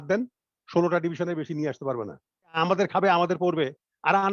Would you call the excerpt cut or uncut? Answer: cut